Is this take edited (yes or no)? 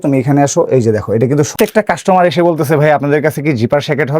yes